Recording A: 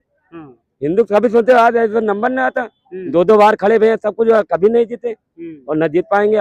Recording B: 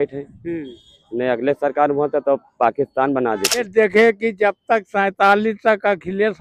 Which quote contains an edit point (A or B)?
B